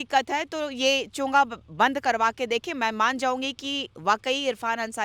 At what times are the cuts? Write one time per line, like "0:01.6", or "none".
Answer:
none